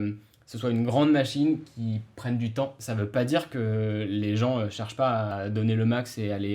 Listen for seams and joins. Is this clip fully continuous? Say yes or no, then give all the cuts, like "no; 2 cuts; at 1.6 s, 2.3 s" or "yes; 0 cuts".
no; 2 cuts; at 2.8 s, 5.3 s